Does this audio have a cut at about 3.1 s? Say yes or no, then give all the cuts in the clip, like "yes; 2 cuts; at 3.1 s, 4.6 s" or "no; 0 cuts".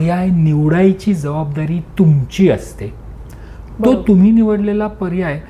no; 0 cuts